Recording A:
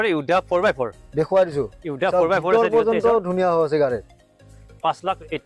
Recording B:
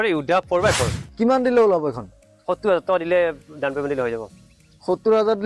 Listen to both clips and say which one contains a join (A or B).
B